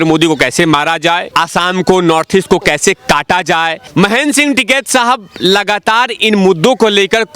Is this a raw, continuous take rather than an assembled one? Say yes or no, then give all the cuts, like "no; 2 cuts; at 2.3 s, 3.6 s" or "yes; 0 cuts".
no; 2 cuts; at 1.3 s, 3.8 s